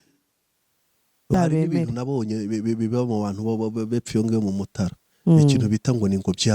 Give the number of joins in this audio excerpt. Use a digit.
1